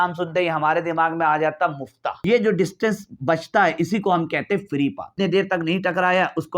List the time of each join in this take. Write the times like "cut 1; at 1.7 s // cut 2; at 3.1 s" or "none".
cut 1; at 2.2 s // cut 2; at 5.0 s

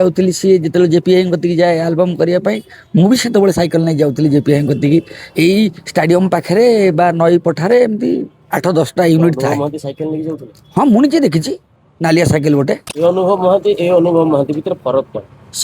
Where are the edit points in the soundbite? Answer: cut 1; at 12.9 s

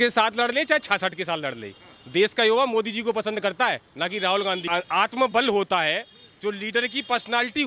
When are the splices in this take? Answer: cut 1; at 4.7 s

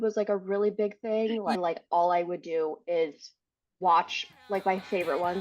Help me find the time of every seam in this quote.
cut 1; at 1.6 s

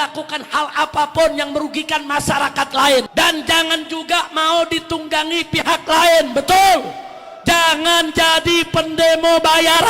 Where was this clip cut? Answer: cut 1; at 3.1 s

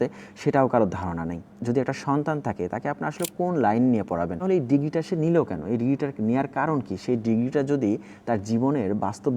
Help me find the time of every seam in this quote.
cut 1; at 1.4 s // cut 2; at 4.4 s

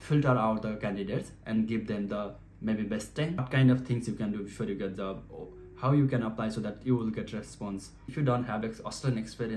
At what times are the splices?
cut 1; at 3.5 s // cut 2; at 8.0 s

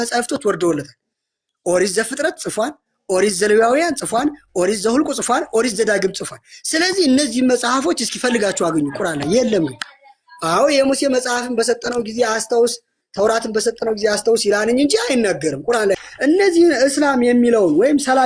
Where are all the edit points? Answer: cut 1; at 16.0 s

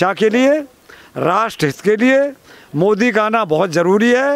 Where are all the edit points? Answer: none

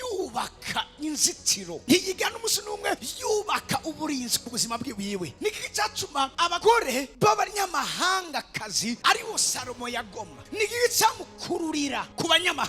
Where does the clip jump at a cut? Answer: cut 1; at 5.3 s

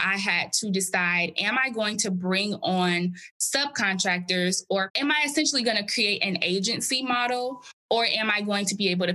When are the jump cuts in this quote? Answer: cut 1; at 4.9 s

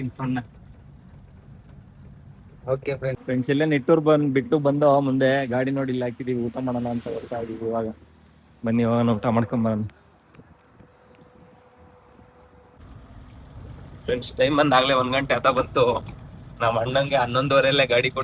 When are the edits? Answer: cut 1; at 3.2 s // cut 2; at 12.8 s

